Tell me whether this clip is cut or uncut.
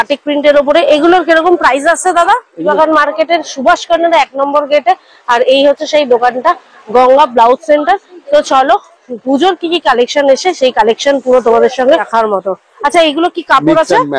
cut